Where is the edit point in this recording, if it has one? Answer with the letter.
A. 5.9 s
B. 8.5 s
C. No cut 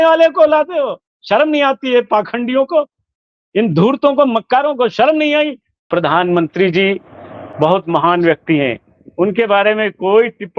A